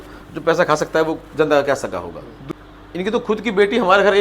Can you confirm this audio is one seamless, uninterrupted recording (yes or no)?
no